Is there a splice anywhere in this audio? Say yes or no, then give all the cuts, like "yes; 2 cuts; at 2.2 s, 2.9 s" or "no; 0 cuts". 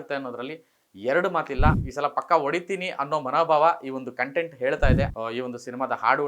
yes; 2 cuts; at 1.8 s, 5.1 s